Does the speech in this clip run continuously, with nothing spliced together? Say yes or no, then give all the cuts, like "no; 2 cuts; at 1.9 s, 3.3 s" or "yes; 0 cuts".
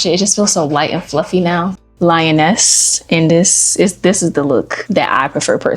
no; 2 cuts; at 1.8 s, 4.8 s